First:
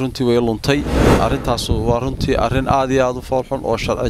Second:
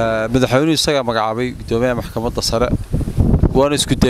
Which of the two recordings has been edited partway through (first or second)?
first